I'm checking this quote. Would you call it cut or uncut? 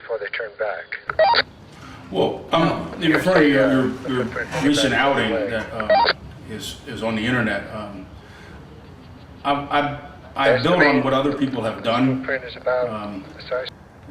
cut